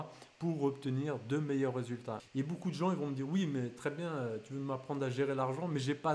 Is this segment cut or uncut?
cut